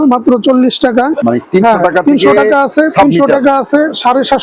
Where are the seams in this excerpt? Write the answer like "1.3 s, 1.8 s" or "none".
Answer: 1.2 s